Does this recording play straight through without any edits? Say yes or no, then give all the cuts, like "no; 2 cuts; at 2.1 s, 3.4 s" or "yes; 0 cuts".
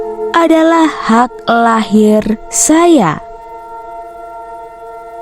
yes; 0 cuts